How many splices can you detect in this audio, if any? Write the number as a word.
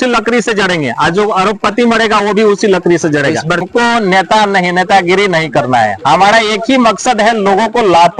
one